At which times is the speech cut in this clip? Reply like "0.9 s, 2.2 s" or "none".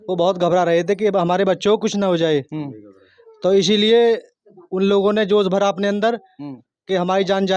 none

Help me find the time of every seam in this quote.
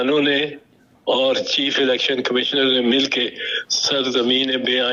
none

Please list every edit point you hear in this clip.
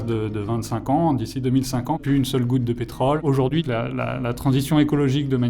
3.2 s

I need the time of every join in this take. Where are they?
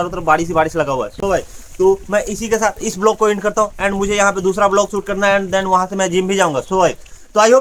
none

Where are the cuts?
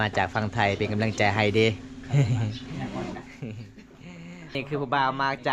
4.5 s

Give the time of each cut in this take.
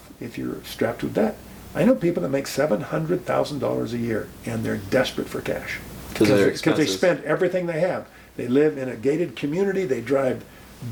none

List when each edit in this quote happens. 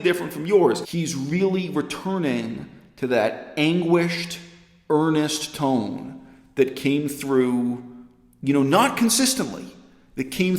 0.9 s

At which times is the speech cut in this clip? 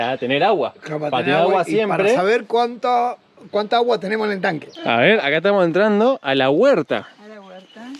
4.7 s

